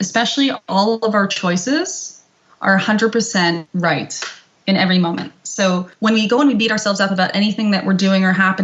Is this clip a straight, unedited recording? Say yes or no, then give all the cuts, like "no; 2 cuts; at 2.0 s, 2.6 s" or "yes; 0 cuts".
no; 2 cuts; at 3.6 s, 5.9 s